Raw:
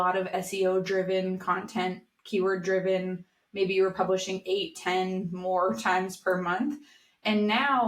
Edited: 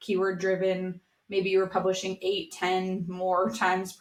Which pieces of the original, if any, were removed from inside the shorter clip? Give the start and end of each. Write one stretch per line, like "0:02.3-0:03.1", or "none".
none